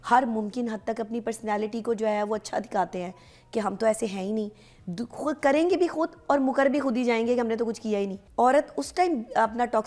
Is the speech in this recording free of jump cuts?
no; 1 cut; at 8.2 s

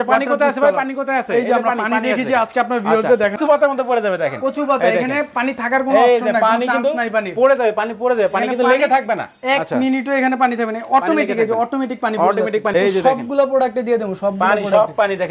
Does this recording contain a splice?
yes; 2 cuts; at 3.4 s, 12.7 s

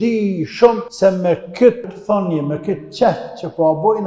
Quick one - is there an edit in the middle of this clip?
yes; 2 cuts; at 0.9 s, 1.9 s

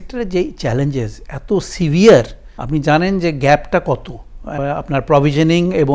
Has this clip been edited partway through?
no; 0 cuts

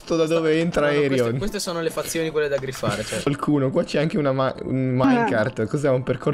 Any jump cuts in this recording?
yes; 1 cut; at 3.3 s

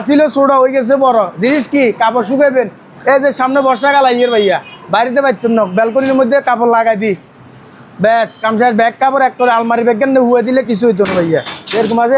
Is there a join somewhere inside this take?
no; 0 cuts

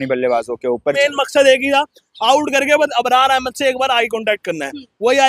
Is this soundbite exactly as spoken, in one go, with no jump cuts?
no; 1 cut; at 1.0 s

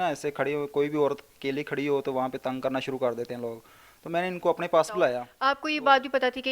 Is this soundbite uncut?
no; 1 cut; at 5.3 s

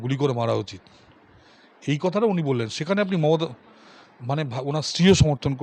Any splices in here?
no; 0 cuts

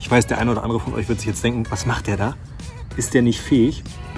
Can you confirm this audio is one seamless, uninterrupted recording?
yes; 0 cuts

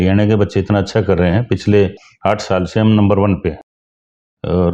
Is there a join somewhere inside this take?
no; 0 cuts

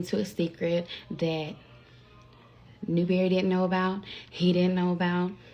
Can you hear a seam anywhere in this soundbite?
no; 0 cuts

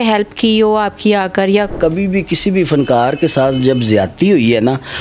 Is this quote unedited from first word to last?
no; 1 cut; at 1.7 s

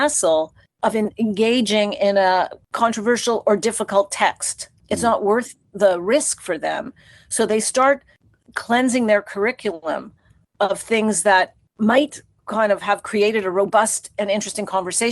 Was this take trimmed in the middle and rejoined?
yes; 1 cut; at 2.6 s

